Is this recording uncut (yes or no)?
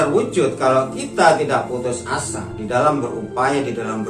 yes